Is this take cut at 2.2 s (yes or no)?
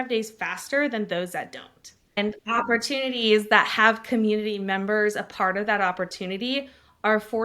yes